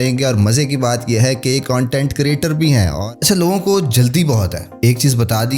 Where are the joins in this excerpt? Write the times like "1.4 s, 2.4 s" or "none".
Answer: 3.0 s, 4.6 s